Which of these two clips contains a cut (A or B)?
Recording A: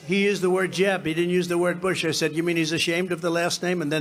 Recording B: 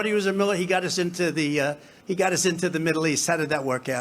B